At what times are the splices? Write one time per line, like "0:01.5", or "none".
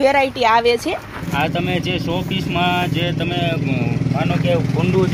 0:01.2